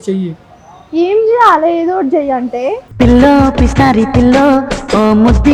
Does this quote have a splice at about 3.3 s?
no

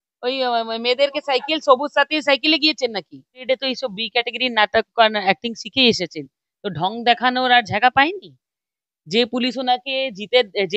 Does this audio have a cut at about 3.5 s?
yes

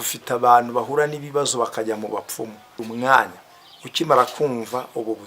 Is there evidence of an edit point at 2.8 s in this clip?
yes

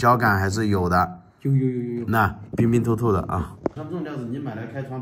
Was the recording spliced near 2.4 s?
yes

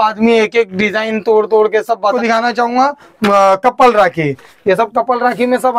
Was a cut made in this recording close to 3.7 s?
no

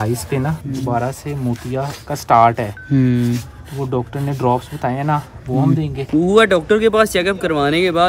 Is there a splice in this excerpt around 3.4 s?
no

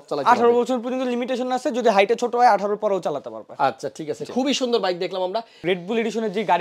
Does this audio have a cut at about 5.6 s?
yes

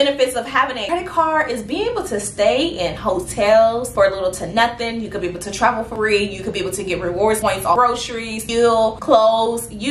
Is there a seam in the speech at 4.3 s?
no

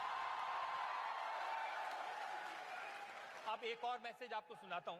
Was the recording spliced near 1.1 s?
no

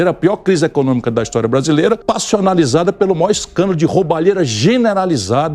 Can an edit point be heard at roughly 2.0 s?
yes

